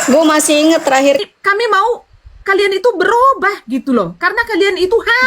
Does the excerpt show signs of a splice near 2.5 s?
no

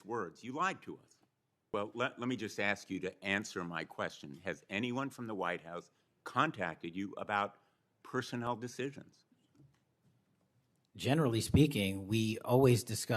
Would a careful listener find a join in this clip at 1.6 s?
yes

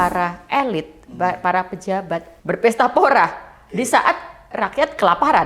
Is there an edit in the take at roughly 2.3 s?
yes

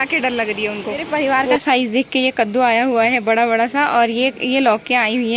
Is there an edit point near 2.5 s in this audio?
no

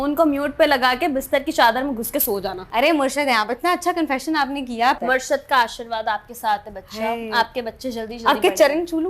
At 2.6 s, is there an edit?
yes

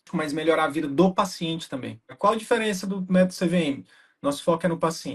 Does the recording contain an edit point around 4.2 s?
no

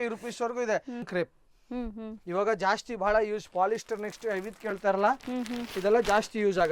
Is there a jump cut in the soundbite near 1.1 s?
yes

